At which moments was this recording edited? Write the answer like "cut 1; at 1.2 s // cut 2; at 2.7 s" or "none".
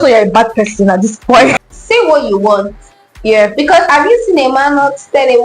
cut 1; at 1.6 s